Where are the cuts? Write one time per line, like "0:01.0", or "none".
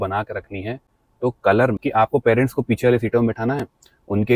0:01.8